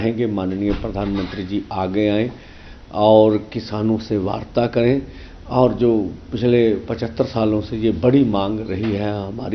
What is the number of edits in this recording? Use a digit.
0